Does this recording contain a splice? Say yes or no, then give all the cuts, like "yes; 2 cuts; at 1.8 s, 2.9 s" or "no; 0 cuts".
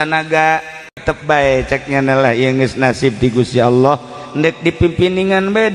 yes; 1 cut; at 1.0 s